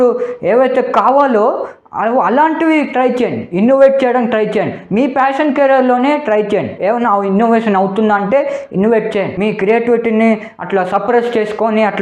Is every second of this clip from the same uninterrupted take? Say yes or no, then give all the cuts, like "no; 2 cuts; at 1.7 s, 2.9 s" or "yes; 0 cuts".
yes; 0 cuts